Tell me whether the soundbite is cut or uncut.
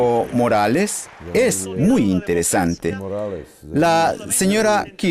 cut